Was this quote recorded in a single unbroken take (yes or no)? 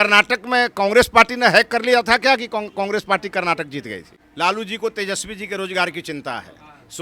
no